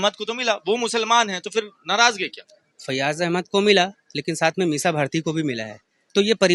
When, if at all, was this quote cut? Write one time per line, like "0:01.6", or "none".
none